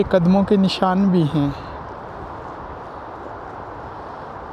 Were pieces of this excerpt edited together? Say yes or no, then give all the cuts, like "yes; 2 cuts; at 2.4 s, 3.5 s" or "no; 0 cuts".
no; 0 cuts